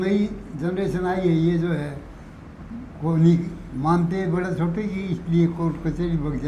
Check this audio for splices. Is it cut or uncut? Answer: uncut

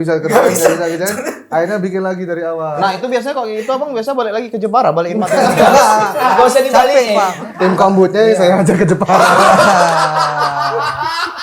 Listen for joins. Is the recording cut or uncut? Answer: cut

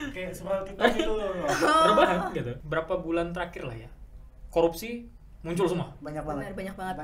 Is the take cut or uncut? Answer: cut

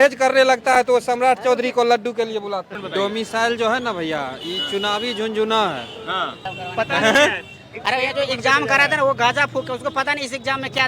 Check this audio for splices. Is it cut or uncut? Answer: cut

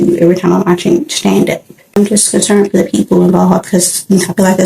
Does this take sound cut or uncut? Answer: cut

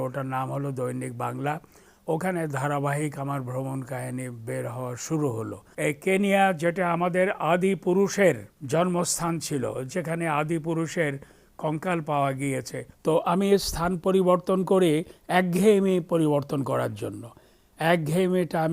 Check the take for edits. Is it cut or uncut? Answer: cut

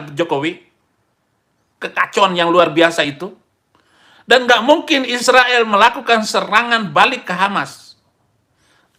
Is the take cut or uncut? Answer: uncut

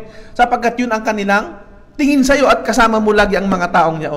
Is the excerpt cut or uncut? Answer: uncut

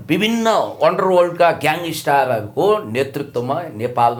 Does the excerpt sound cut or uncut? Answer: uncut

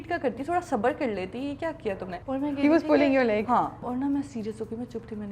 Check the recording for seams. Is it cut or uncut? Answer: cut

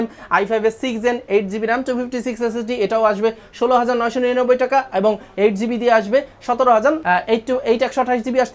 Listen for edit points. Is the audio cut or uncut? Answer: uncut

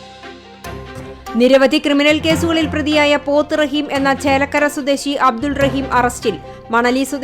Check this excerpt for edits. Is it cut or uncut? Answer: cut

